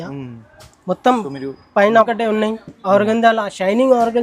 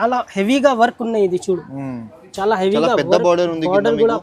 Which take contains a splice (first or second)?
first